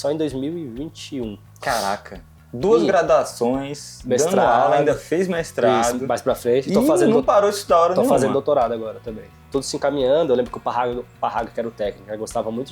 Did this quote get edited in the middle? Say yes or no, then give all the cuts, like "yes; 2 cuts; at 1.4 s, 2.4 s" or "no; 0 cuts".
yes; 1 cut; at 9.6 s